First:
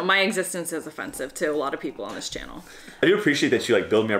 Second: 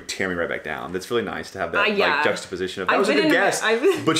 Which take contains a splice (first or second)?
first